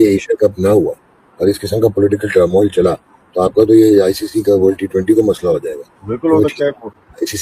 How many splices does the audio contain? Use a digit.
0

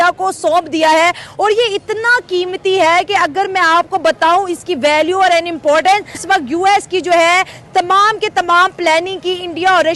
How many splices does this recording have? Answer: 1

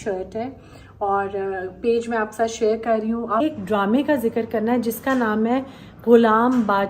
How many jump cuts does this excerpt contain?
1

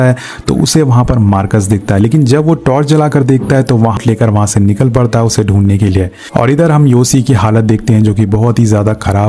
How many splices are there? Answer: 1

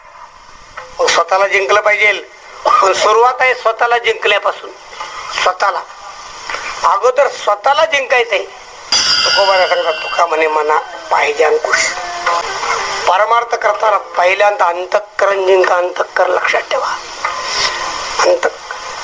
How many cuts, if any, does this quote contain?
2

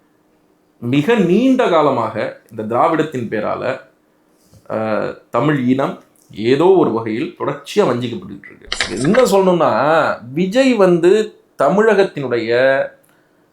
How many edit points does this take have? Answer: 1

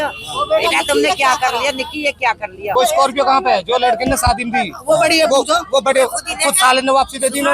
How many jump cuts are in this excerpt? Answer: 1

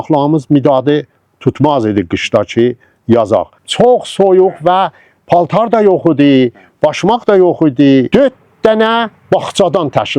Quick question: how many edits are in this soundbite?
2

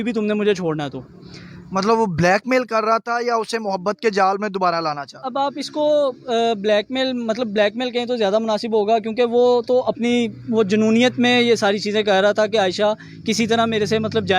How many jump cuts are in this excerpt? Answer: 0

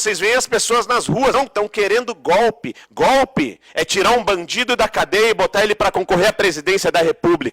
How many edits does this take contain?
1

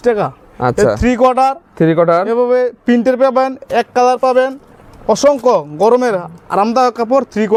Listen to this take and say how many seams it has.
0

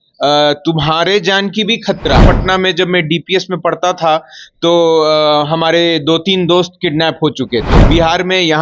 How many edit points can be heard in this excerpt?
2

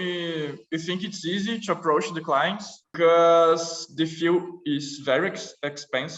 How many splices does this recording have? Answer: 1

